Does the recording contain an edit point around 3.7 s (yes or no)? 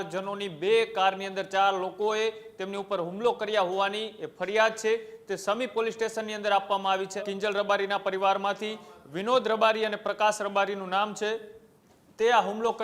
no